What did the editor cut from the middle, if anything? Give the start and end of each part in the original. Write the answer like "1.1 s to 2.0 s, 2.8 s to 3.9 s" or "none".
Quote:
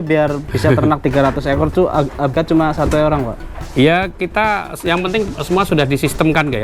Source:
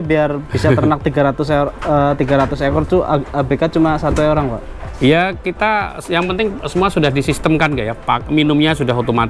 1.0 s to 2.2 s, 3.5 s to 3.6 s